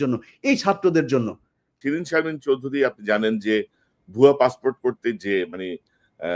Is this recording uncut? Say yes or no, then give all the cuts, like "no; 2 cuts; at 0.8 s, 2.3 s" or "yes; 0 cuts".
no; 1 cut; at 1.7 s